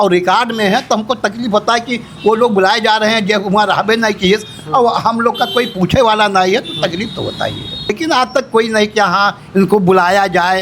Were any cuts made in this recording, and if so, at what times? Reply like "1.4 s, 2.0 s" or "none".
7.9 s